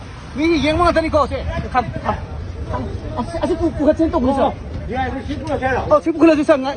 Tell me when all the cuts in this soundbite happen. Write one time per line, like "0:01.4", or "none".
0:05.8